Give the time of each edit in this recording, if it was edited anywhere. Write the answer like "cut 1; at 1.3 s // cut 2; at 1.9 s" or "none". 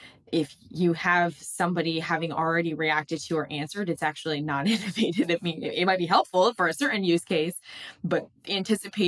none